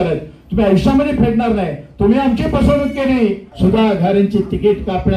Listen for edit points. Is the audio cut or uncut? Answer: cut